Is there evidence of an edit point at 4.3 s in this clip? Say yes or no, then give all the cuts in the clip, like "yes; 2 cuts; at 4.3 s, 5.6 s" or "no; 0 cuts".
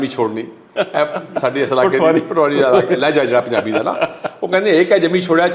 no; 0 cuts